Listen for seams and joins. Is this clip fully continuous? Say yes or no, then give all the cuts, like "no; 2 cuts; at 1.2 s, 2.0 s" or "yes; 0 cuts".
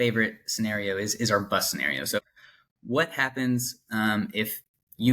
no; 1 cut; at 2.2 s